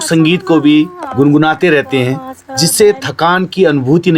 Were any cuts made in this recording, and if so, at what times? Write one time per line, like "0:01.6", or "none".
none

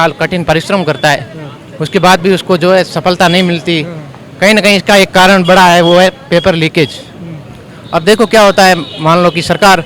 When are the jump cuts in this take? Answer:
none

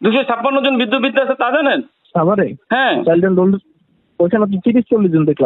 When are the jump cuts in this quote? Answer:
0:02.0

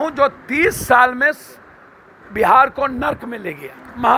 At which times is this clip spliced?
none

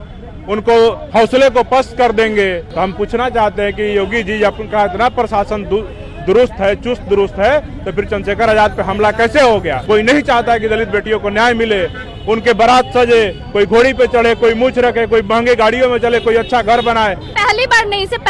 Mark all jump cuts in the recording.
0:02.6
0:09.8
0:17.2

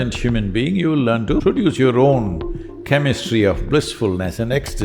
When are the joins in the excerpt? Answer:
0:01.4

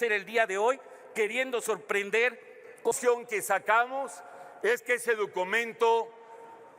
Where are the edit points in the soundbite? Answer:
0:02.9

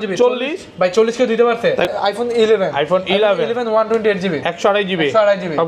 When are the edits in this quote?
0:01.9

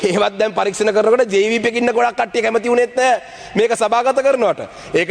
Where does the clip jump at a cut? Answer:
none

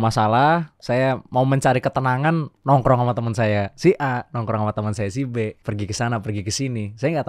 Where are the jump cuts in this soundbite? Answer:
0:05.6

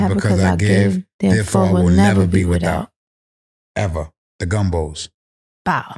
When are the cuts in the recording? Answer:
0:04.2

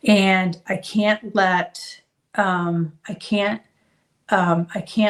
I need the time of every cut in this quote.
none

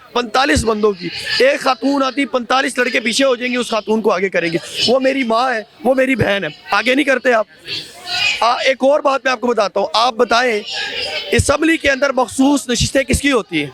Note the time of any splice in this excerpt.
none

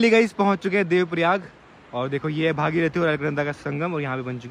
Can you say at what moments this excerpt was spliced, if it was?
none

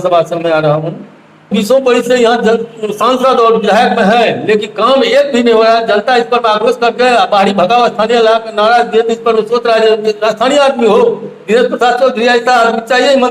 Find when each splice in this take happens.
0:01.5

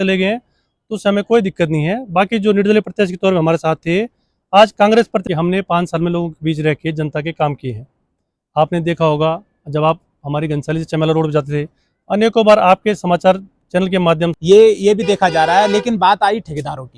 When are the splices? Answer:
0:05.2
0:14.4

